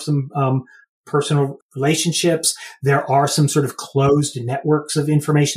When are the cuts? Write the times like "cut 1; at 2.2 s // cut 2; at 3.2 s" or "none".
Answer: cut 1; at 1.6 s